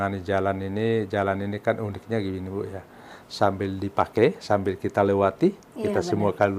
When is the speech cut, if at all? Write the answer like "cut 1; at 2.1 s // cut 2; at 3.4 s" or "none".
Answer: none